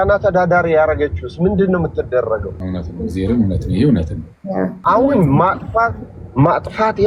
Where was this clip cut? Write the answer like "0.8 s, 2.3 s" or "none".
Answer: 2.6 s, 4.8 s